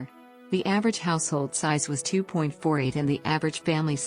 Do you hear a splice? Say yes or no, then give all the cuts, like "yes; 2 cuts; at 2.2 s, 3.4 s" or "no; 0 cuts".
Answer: yes; 1 cut; at 2.6 s